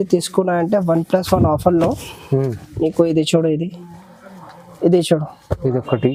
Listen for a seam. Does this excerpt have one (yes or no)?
no